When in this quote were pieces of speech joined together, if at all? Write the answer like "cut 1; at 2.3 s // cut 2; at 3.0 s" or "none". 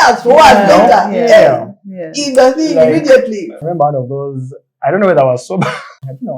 cut 1; at 3.6 s